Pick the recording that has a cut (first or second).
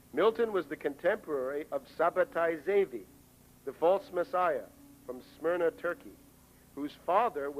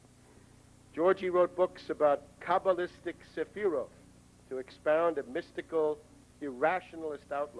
second